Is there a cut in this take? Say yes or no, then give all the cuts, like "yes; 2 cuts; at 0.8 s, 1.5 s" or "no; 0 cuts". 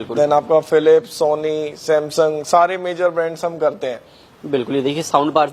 no; 0 cuts